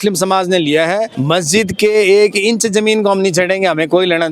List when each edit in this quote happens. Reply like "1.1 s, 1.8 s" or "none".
1.1 s